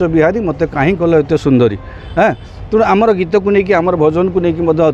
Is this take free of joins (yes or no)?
yes